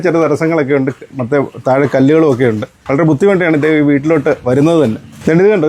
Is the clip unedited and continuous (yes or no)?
yes